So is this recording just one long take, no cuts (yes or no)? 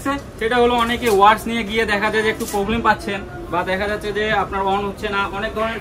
yes